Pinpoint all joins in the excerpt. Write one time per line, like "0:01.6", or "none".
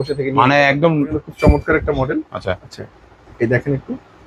0:01.2

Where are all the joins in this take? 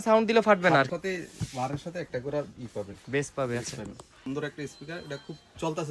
0:00.9
0:04.2

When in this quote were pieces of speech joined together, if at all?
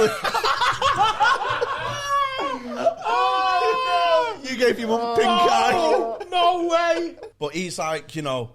0:07.2

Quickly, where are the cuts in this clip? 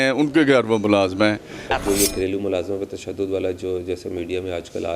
0:01.7

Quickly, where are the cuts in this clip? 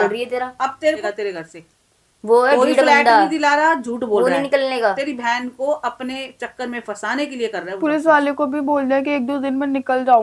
0:01.0

